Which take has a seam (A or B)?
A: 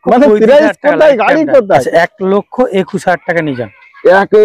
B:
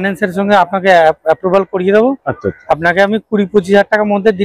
A